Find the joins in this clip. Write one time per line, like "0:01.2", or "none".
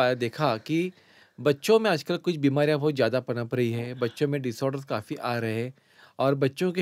none